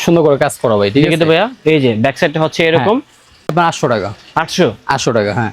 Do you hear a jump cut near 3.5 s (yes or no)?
no